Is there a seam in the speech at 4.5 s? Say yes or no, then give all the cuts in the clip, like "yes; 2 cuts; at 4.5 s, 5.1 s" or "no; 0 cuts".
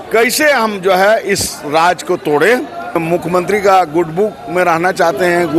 no; 1 cut; at 3.0 s